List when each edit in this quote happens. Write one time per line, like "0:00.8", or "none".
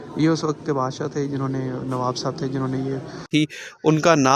0:03.3